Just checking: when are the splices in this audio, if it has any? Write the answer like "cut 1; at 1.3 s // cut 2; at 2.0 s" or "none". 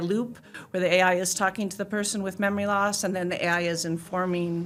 none